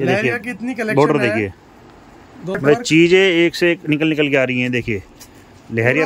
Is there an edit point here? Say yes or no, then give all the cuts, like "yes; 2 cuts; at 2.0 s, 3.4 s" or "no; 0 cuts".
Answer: yes; 1 cut; at 2.6 s